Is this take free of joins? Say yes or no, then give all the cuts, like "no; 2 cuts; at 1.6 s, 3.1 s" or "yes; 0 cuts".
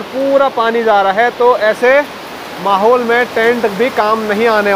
yes; 0 cuts